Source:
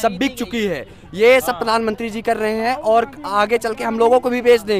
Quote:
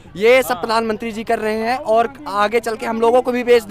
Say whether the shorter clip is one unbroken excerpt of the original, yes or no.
yes